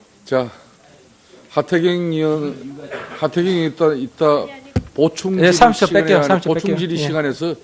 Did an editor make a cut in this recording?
no; 0 cuts

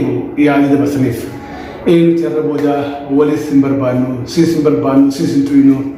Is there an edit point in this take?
no; 0 cuts

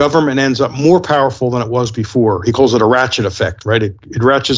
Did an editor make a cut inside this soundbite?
no; 0 cuts

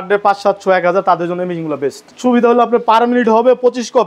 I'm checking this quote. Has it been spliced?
yes; 1 cut; at 2.1 s

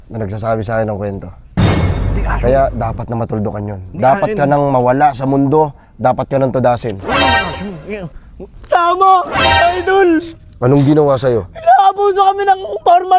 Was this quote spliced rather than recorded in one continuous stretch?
yes; 1 cut; at 8.5 s

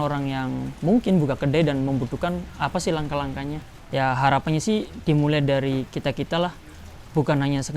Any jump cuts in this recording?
yes; 1 cut; at 3.6 s

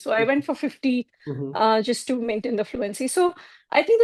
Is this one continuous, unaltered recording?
yes; 0 cuts

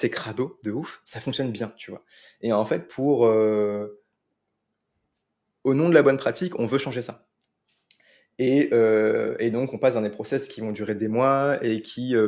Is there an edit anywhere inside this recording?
no; 0 cuts

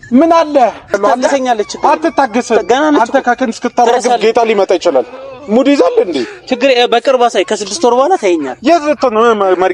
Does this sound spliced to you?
yes; 1 cut; at 0.9 s

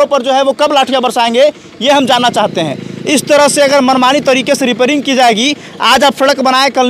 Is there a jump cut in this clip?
no; 0 cuts

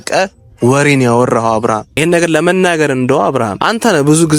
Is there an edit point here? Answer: yes; 2 cuts; at 1.9 s, 3.6 s

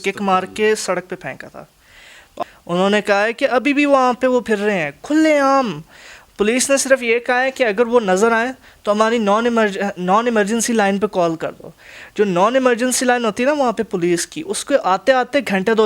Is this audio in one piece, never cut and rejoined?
no; 1 cut; at 2.4 s

